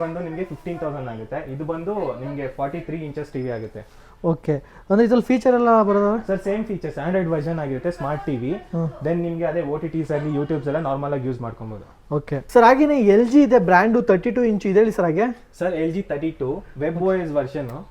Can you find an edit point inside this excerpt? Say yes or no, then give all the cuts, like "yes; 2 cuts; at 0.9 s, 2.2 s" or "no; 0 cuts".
no; 0 cuts